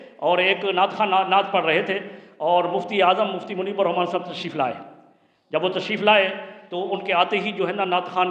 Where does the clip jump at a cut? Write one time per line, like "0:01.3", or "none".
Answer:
none